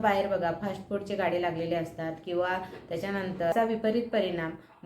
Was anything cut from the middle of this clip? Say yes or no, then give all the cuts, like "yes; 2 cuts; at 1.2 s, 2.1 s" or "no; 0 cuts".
yes; 1 cut; at 3.5 s